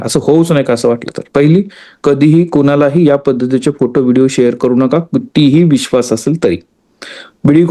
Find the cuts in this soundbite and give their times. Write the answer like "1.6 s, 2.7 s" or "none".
none